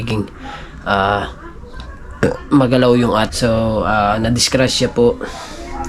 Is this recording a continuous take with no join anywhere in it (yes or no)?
no